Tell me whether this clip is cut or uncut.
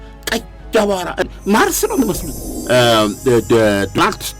cut